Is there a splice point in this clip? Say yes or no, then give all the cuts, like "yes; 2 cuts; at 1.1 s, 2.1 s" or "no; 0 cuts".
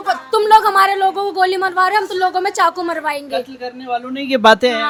no; 0 cuts